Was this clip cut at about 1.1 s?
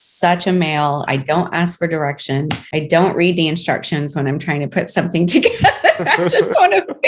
yes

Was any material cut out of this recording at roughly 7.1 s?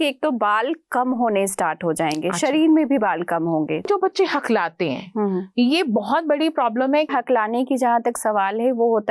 yes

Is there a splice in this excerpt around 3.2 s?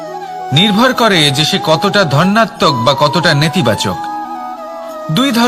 no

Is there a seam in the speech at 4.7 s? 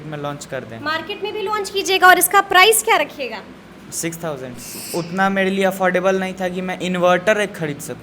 yes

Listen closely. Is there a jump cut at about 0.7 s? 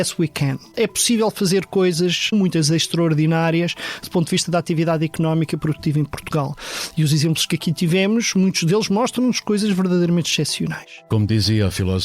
yes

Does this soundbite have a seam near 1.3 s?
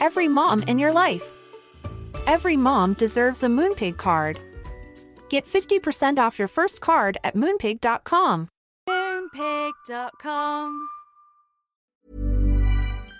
no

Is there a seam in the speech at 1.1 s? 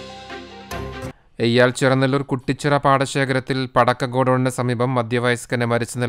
yes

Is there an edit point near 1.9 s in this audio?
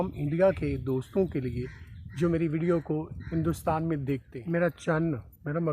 no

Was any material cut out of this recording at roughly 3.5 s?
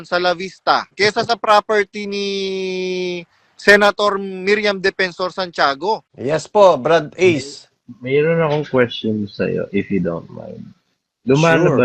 no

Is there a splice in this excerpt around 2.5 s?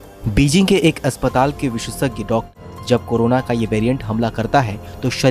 yes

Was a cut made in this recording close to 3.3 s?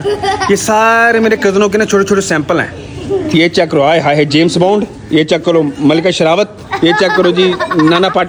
yes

